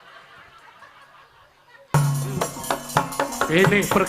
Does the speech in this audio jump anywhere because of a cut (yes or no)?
yes